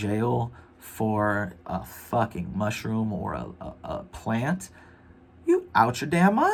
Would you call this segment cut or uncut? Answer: uncut